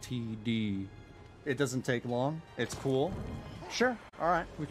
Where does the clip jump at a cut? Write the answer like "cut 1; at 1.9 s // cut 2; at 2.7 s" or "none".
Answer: cut 1; at 2.5 s